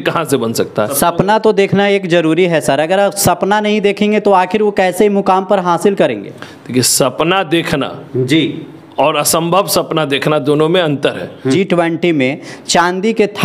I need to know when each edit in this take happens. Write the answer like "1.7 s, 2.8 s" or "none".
0.9 s, 11.6 s